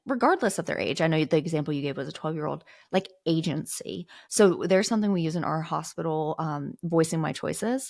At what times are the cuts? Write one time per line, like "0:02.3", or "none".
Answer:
none